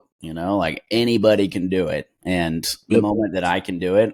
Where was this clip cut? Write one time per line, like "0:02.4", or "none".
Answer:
none